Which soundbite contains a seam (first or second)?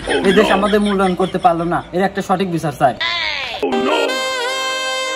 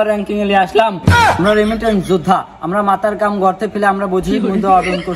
first